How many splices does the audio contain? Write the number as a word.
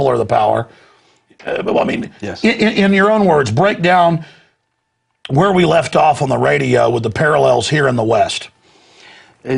one